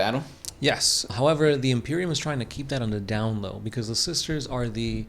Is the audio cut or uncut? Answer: cut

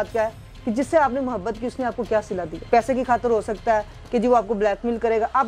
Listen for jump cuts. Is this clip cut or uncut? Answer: cut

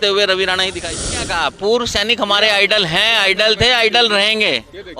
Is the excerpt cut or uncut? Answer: cut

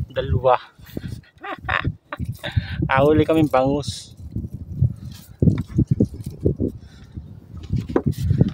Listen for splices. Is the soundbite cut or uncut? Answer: uncut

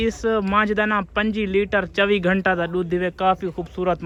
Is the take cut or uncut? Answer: uncut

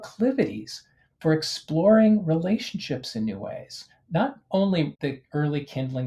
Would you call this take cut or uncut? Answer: uncut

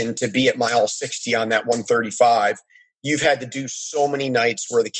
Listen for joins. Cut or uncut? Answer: uncut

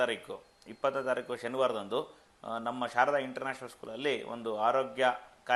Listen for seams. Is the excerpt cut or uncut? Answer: uncut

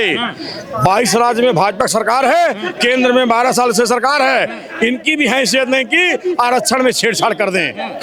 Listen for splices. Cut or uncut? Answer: uncut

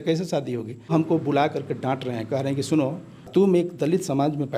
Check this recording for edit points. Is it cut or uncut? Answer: cut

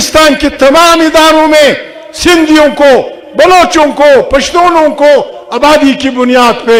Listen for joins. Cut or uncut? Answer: uncut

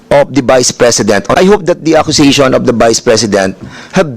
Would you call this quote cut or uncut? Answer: cut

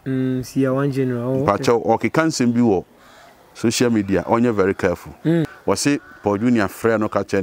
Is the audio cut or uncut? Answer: cut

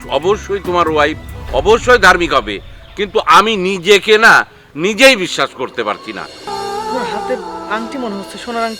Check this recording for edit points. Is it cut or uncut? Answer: cut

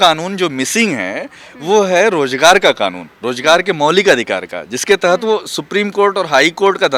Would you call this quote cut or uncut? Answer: uncut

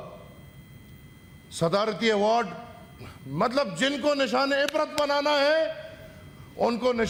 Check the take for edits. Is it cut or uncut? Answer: uncut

